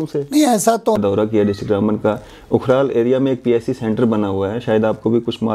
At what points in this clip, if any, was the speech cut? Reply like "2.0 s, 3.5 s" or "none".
1.0 s